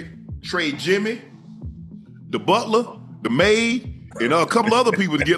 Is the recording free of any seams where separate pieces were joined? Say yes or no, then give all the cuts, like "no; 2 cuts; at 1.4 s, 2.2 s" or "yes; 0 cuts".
yes; 0 cuts